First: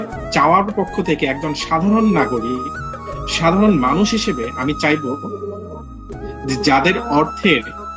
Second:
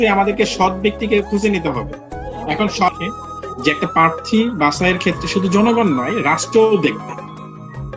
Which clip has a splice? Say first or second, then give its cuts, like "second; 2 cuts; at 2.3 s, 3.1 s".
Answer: second; 1 cut; at 2.9 s